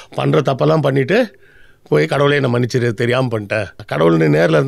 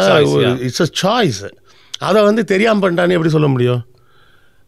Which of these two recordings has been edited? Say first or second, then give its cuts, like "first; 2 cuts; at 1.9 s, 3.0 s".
first; 1 cut; at 3.8 s